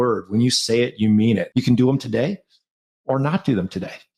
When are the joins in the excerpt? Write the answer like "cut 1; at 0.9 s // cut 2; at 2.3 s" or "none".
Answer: cut 1; at 1.5 s

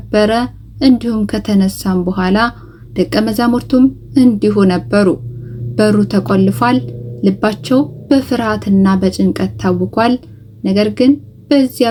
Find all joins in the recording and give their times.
none

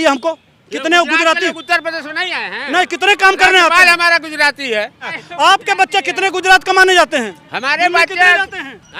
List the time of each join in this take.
cut 1; at 5.2 s

